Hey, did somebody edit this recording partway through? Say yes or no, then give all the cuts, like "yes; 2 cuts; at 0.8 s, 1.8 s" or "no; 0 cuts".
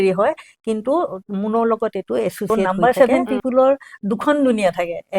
yes; 1 cut; at 2.6 s